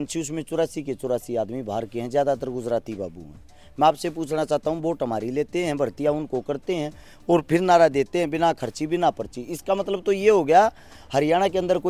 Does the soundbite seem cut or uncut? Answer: uncut